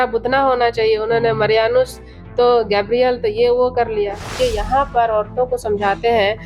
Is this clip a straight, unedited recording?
no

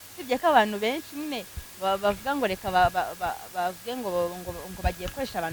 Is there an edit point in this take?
no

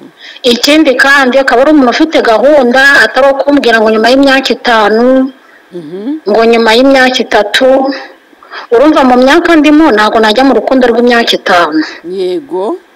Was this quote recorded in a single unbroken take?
yes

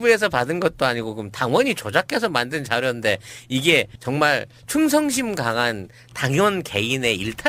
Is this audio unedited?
yes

